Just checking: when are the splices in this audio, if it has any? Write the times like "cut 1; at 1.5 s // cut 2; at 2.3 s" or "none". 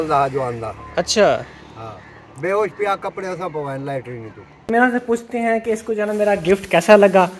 cut 1; at 4.6 s